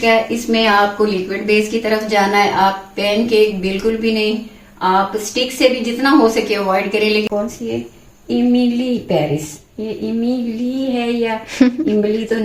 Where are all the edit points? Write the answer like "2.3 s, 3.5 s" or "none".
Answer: 7.3 s